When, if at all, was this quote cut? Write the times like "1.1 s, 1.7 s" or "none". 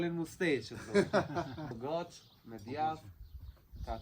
1.8 s